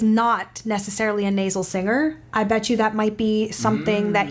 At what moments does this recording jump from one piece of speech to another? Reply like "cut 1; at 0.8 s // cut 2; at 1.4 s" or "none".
none